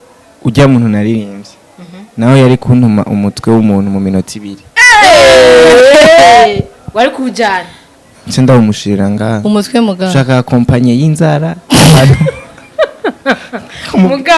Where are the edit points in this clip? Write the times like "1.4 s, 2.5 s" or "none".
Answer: none